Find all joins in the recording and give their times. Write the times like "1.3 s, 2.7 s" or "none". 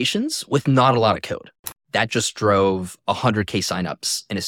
1.6 s